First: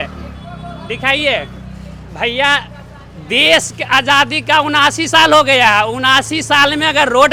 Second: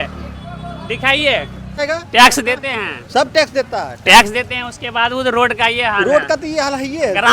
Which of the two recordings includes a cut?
second; 1 cut; at 1.8 s

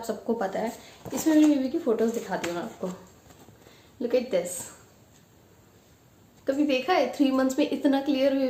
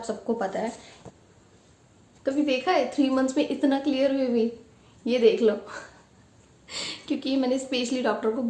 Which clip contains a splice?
second; 1 cut; at 0.9 s

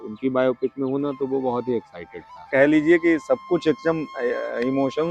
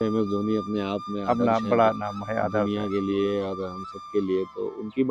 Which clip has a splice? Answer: first; 1 cut; at 2.5 s

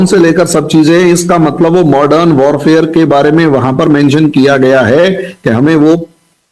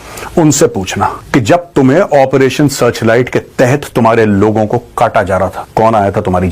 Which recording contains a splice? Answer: second; 2 cuts; at 1.2 s, 5.6 s

